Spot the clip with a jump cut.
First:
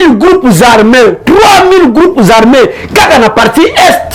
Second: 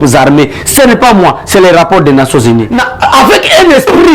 second; 1 cut; at 2.8 s

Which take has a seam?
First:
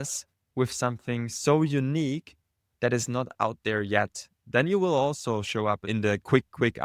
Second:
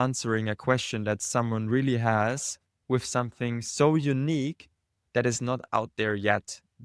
first; 1 cut; at 5.8 s

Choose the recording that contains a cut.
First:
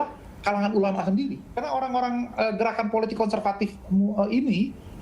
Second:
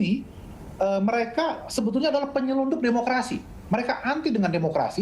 first; 1 cut; at 1.5 s

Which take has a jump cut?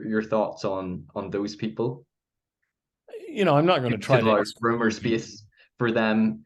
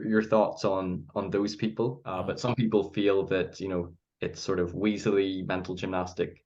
second; 1 cut; at 2.1 s

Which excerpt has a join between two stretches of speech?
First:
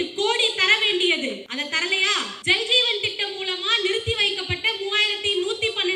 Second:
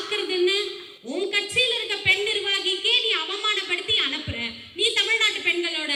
first; 1 cut; at 1.9 s

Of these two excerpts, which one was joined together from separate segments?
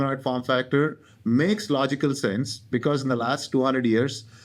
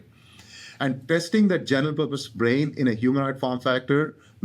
second; 1 cut; at 1.0 s

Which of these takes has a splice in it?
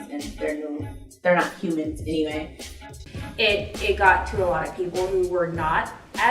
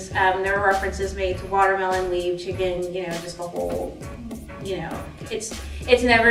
first; 1 cut; at 2.9 s

